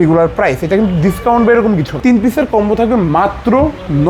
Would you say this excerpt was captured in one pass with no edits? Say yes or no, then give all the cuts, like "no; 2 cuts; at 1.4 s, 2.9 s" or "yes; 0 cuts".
no; 1 cut; at 2.0 s